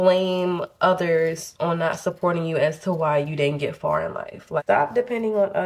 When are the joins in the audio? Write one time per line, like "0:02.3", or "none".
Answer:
0:04.6